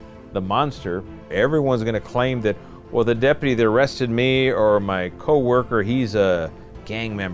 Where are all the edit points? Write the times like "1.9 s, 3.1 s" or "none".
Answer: 1.3 s